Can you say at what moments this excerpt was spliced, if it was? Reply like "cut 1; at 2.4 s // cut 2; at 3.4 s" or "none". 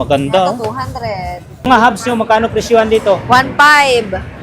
cut 1; at 1.7 s

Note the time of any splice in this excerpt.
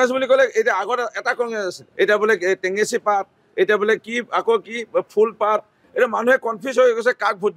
cut 1; at 1.8 s // cut 2; at 5.8 s

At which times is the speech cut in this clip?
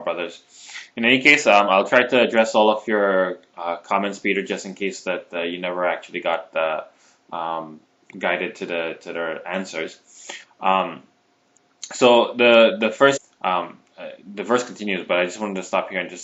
none

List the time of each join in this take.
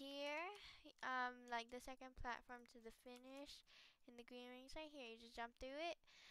none

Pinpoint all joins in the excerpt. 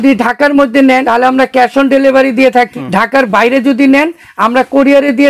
cut 1; at 1.0 s // cut 2; at 2.7 s

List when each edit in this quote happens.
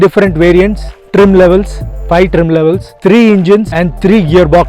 cut 1; at 3.7 s

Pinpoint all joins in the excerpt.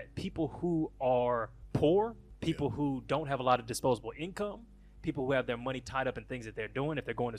cut 1; at 1.6 s // cut 2; at 2.3 s

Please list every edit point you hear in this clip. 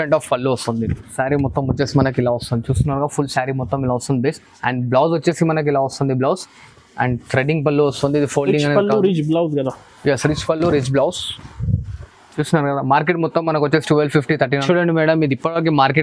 cut 1; at 1.0 s // cut 2; at 14.6 s

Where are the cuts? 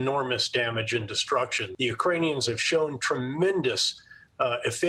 cut 1; at 1.6 s

